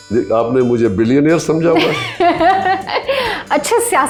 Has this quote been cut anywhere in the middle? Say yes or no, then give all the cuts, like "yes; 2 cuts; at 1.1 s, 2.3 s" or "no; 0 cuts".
no; 0 cuts